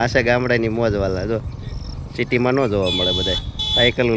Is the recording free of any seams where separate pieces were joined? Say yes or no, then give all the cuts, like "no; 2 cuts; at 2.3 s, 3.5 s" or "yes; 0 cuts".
yes; 0 cuts